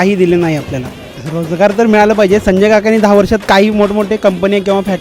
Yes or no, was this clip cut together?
yes